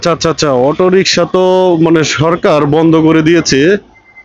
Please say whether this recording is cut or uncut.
uncut